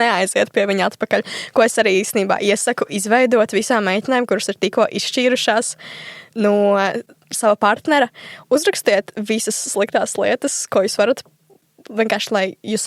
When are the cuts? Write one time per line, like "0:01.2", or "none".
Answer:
0:07.4
0:11.6